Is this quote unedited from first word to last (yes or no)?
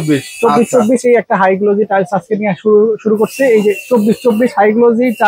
yes